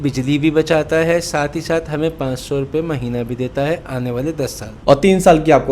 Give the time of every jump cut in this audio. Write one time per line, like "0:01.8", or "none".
0:04.8